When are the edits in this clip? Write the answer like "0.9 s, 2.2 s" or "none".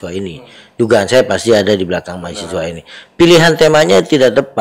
none

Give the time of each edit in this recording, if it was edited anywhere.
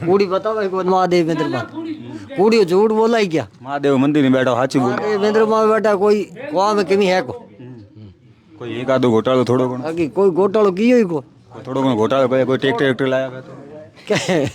none

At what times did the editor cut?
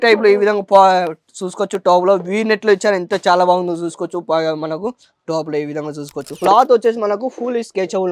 6.3 s

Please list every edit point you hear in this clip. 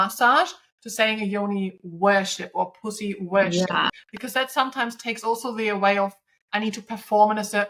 none

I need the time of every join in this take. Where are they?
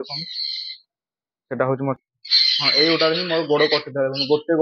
2.0 s

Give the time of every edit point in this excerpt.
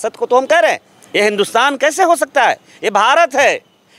0.9 s

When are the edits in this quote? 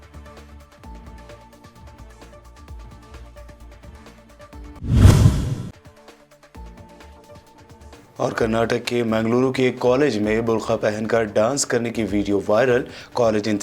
0.9 s

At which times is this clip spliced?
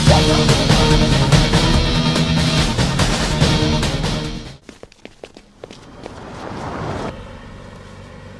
7.1 s

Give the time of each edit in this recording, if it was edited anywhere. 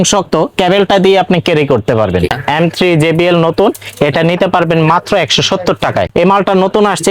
2.3 s, 6.1 s

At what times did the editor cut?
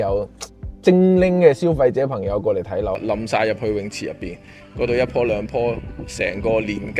2.9 s

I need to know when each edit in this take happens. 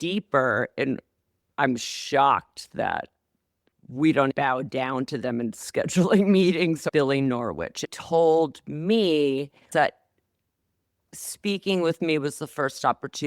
4.3 s, 6.9 s, 7.9 s, 9.7 s

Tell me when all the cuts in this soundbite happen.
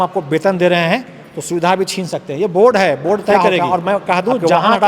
3.3 s

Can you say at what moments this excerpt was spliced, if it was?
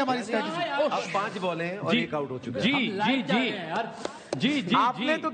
none

